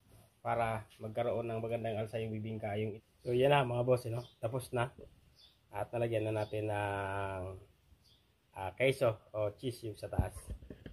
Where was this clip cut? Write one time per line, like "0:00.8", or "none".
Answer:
0:03.0